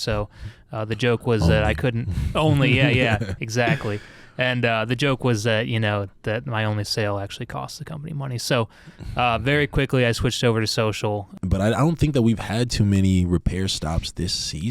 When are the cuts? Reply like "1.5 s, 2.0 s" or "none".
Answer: 11.3 s